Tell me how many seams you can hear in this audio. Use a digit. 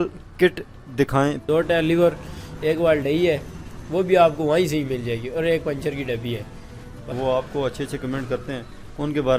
2